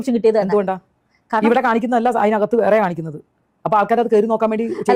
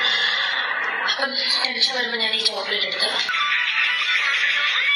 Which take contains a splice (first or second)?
second